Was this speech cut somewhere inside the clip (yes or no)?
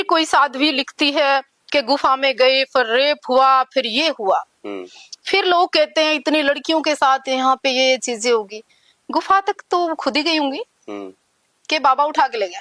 no